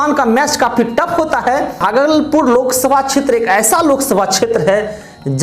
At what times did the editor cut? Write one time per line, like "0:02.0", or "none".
0:01.8